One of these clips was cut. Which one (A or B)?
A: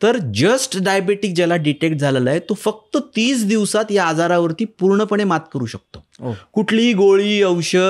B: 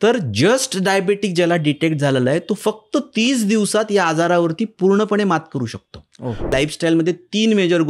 B